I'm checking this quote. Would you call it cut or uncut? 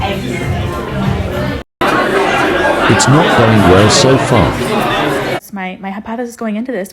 cut